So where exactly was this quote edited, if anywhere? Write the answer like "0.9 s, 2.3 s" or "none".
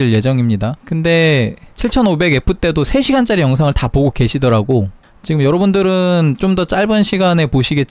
none

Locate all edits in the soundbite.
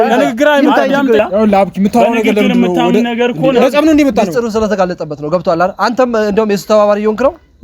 1.2 s

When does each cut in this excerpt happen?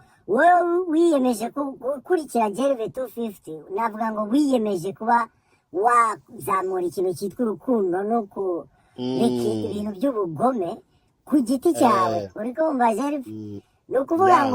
none

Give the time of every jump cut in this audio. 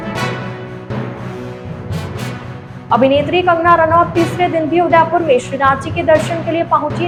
none

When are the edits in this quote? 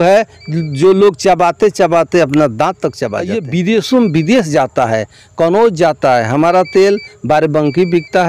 3.4 s

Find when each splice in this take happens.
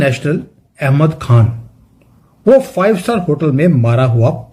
none

